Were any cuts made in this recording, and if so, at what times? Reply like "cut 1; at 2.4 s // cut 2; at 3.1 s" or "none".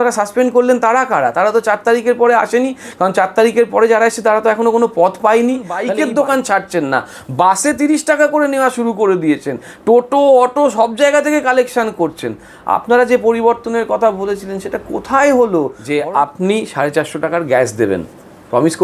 cut 1; at 5.8 s // cut 2; at 15.8 s